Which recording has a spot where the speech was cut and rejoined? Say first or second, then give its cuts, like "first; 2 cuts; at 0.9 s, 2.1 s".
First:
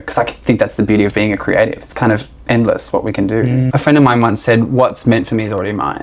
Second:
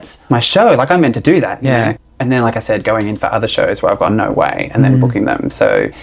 first; 1 cut; at 3.7 s